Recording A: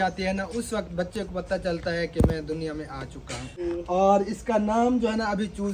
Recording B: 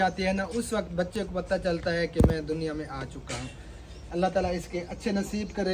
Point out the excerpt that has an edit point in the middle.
A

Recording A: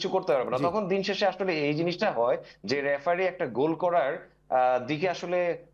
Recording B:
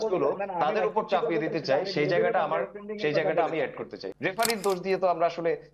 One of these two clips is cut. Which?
B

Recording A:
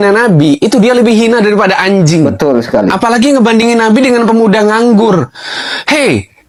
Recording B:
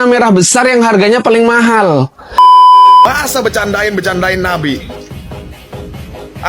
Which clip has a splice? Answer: B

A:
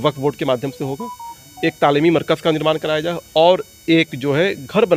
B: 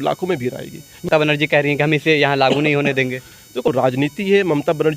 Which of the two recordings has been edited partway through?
B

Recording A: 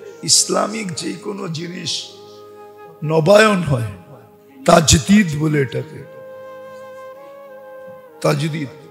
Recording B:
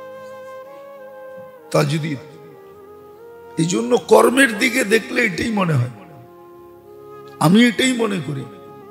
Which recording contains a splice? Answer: B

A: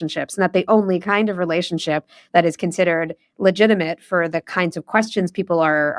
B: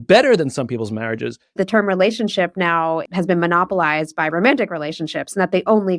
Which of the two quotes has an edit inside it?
B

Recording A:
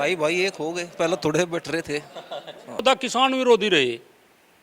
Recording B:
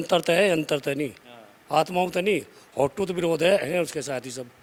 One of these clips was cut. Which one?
A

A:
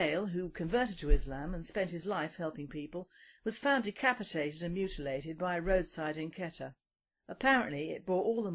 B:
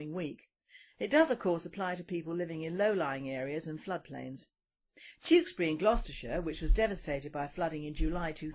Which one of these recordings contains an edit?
A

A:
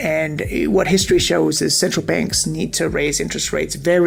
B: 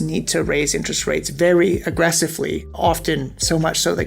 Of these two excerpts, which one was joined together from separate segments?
B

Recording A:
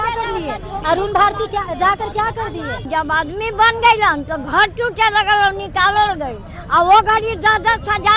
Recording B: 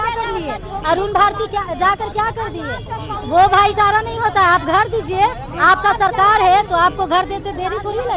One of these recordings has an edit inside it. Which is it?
A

